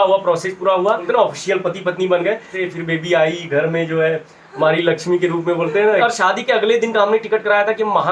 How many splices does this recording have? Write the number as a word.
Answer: three